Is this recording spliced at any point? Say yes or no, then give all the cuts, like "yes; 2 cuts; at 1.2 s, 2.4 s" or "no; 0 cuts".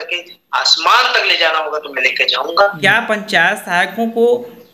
yes; 1 cut; at 2.8 s